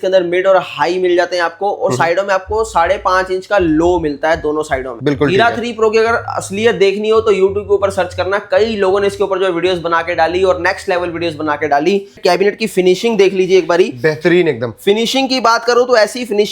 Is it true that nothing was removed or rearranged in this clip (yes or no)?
no